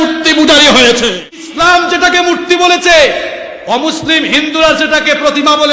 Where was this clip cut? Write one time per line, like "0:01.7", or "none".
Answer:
0:01.5